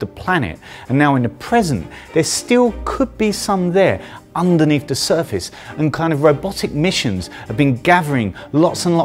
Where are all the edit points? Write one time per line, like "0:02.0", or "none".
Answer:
0:02.4